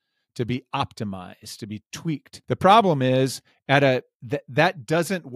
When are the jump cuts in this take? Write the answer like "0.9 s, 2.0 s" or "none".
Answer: 2.3 s